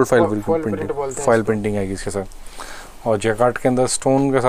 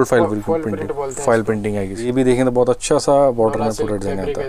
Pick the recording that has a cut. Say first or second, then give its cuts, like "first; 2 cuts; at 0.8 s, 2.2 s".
second; 1 cut; at 2.0 s